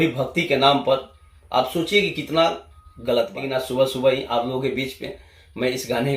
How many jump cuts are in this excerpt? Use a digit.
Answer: 1